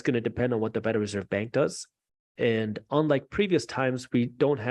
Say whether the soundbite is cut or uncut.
uncut